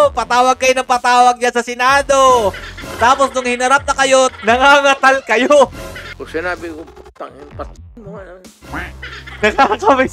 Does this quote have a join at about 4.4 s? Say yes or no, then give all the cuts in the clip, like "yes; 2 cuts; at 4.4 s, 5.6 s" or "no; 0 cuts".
yes; 3 cuts; at 4.4 s, 6.0 s, 9.2 s